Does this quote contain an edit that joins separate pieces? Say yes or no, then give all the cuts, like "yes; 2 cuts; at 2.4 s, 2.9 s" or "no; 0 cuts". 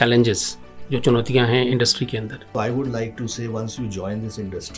yes; 1 cut; at 2.4 s